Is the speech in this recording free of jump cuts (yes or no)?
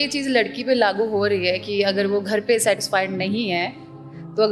no